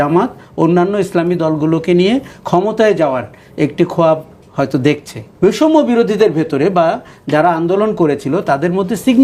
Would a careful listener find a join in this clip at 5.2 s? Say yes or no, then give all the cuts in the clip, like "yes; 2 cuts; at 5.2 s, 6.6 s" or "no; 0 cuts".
yes; 1 cut; at 5.2 s